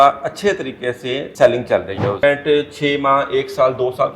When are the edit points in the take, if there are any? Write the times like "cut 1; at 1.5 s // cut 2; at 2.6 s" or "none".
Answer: cut 1; at 1.2 s // cut 2; at 2.2 s